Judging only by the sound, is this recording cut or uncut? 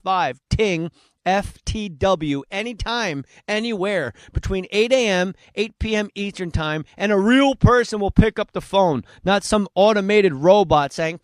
cut